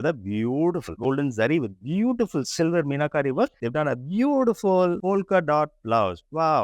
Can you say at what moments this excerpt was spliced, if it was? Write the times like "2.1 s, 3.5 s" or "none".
0.9 s, 3.6 s